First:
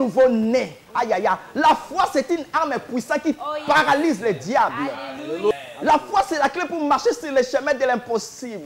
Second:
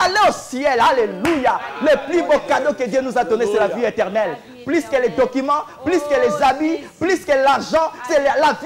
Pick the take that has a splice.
first; 1 cut; at 5.5 s

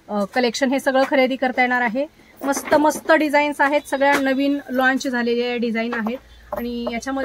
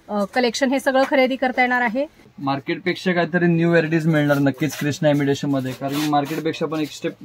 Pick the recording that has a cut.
second; 1 cut; at 2.2 s

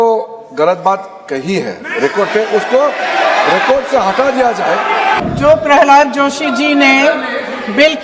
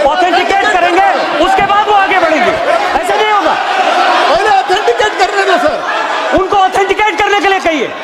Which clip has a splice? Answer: first; 1 cut; at 5.2 s

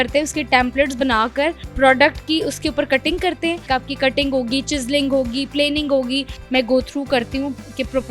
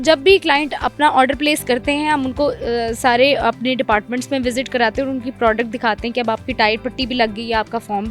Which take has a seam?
first; 2 cuts; at 3.6 s, 6.3 s

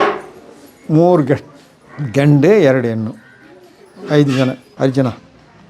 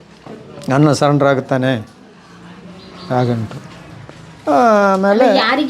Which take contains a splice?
first; 1 cut; at 4.7 s

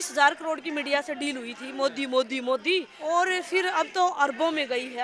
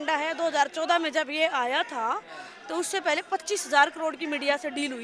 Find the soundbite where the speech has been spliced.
first; 1 cut; at 2.9 s

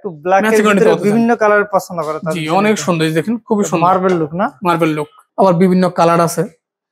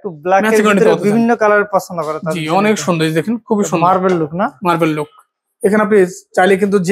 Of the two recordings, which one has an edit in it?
first; 1 cut; at 5.2 s

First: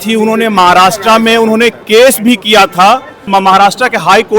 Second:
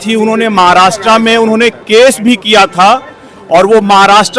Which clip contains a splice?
first; 1 cut; at 3.1 s

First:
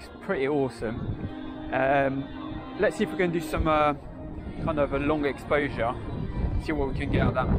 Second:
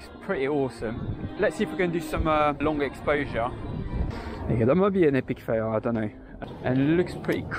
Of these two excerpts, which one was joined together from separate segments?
second; 4 cuts; at 1.2 s, 2.6 s, 4.1 s, 6.3 s

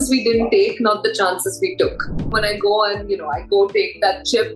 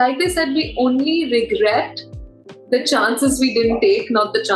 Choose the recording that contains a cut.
first; 1 cut; at 2.3 s

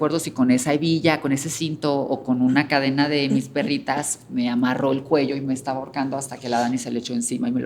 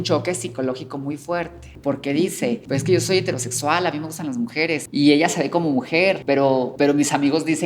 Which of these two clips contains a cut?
second; 4 cuts; at 1.6 s, 2.6 s, 4.9 s, 6.5 s

